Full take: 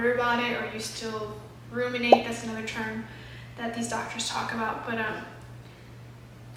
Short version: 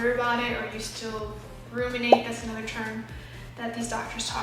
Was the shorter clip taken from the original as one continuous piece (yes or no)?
yes